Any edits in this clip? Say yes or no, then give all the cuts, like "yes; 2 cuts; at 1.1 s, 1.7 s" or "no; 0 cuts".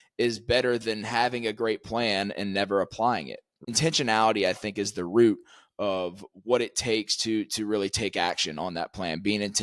yes; 1 cut; at 3.5 s